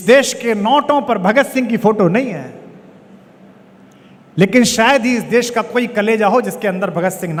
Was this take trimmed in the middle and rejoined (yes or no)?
no